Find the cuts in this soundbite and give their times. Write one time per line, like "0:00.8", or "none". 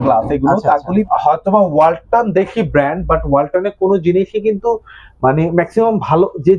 0:01.1